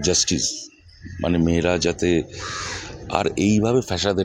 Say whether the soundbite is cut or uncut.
uncut